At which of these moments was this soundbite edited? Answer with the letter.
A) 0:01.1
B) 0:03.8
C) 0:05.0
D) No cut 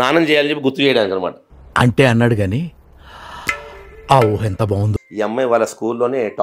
C